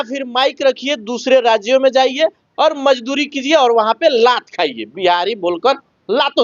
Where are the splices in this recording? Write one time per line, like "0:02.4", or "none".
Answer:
none